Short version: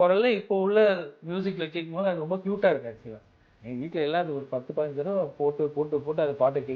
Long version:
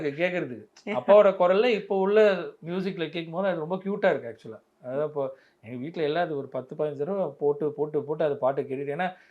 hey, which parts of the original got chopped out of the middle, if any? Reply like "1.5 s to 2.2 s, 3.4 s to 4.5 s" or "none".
4.8 s to 5.4 s